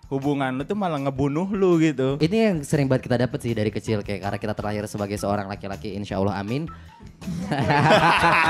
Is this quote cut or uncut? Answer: cut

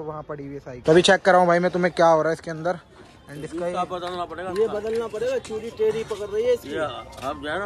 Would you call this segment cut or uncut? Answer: uncut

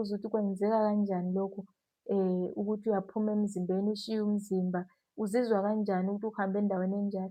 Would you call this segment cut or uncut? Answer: uncut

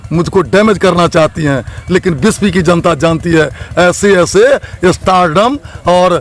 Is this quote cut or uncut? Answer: uncut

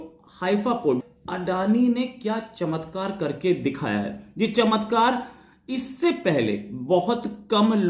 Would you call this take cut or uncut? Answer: cut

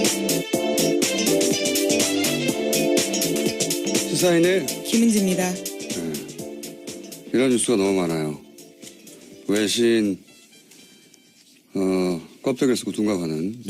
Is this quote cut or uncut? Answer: cut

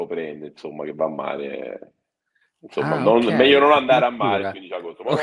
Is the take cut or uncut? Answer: uncut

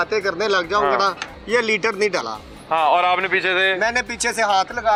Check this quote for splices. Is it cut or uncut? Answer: uncut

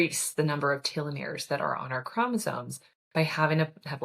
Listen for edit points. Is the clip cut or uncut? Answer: uncut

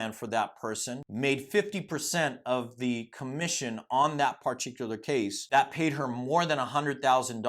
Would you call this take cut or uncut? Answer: cut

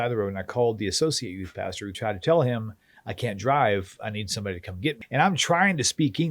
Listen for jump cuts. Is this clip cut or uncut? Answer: cut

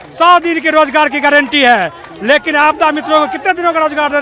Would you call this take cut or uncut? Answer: uncut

